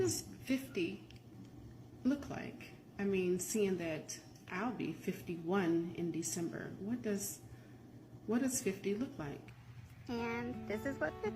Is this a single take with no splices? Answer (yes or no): yes